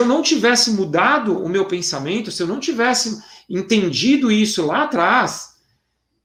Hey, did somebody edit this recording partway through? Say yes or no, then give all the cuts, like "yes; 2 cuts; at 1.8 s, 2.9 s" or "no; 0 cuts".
no; 0 cuts